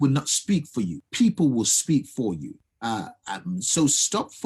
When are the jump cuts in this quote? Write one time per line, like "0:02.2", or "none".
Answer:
0:01.0
0:02.6